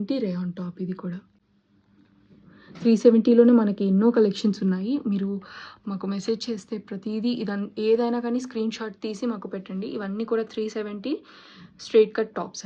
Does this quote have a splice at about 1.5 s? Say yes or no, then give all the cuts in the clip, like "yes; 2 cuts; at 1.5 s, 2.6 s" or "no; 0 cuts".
no; 0 cuts